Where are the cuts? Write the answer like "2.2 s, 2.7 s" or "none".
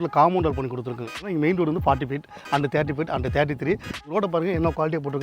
1.2 s, 4.0 s